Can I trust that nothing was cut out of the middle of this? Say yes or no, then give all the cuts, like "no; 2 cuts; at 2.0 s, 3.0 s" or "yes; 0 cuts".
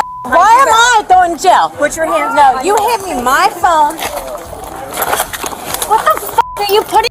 yes; 0 cuts